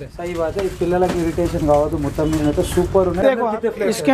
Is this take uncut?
no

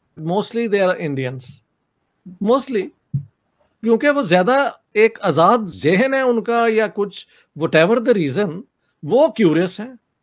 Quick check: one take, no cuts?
yes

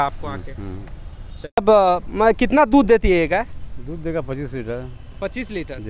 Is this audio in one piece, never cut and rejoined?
no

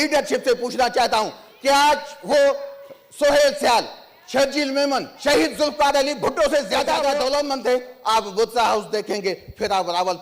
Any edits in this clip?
yes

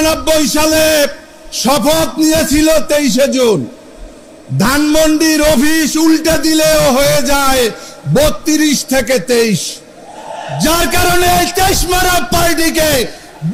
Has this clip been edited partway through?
no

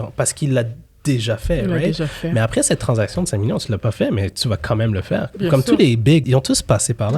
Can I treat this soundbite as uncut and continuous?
no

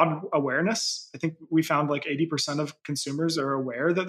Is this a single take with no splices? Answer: yes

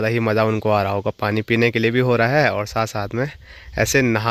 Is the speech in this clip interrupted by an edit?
no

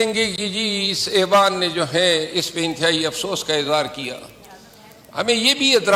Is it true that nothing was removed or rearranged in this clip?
yes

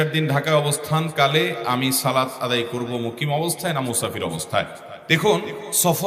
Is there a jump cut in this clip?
no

